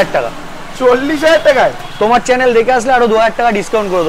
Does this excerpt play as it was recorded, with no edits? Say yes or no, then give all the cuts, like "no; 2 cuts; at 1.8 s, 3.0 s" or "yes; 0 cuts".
yes; 0 cuts